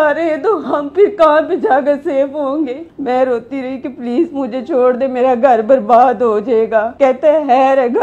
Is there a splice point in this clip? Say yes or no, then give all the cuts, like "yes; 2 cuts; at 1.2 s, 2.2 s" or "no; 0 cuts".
yes; 2 cuts; at 2.9 s, 6.9 s